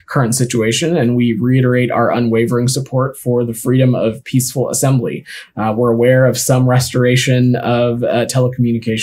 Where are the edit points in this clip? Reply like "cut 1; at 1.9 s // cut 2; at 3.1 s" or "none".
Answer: none